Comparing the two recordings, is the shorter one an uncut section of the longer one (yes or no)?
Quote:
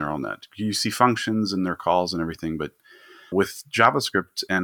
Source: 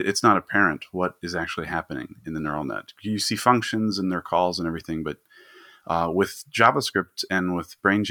no